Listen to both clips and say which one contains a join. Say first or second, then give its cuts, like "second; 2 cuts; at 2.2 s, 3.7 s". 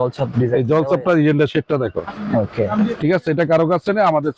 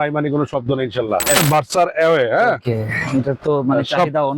second; 1 cut; at 1.4 s